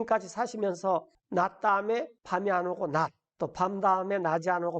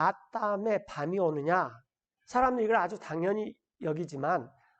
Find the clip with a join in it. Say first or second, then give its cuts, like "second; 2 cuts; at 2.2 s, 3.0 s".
first; 3 cuts; at 1.2 s, 2.2 s, 3.2 s